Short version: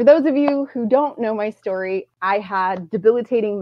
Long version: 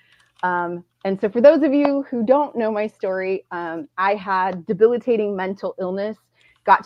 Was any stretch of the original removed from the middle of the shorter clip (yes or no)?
yes